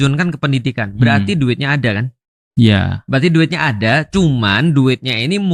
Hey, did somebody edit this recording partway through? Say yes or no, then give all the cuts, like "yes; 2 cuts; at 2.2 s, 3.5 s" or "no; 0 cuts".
no; 0 cuts